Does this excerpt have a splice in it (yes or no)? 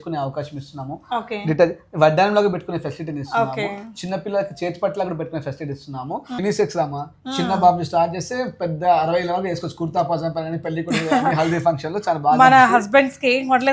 yes